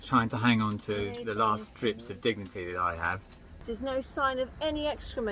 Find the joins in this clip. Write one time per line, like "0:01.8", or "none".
0:03.7